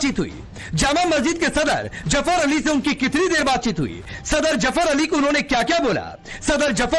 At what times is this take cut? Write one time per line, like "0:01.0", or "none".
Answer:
none